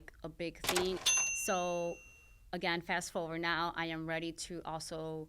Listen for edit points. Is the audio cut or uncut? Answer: cut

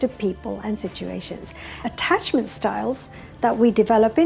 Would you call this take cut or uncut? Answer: cut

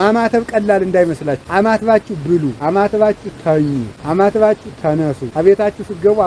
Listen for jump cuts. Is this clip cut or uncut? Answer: cut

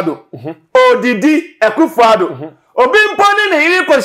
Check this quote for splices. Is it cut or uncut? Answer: uncut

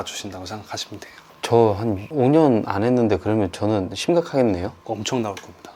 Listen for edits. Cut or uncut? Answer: uncut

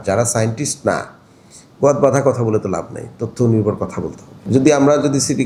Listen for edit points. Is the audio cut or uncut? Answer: cut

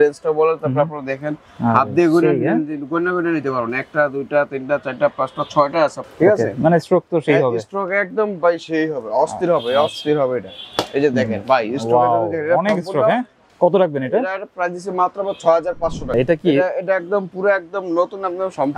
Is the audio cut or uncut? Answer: cut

